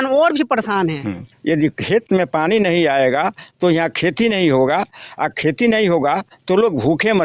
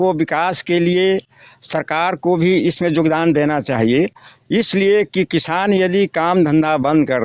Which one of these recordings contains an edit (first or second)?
first